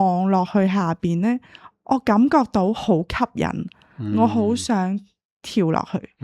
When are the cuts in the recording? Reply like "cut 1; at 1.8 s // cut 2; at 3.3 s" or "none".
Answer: none